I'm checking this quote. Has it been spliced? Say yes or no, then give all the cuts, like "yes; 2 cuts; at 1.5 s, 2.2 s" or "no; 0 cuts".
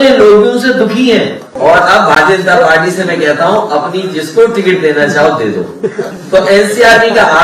yes; 2 cuts; at 1.4 s, 6.1 s